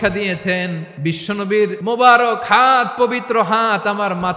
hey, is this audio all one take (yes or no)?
no